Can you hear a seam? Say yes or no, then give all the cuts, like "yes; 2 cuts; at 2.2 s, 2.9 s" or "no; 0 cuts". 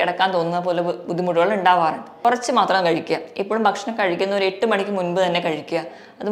yes; 1 cut; at 2.2 s